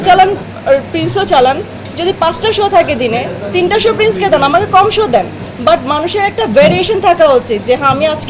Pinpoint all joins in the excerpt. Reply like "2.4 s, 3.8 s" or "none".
none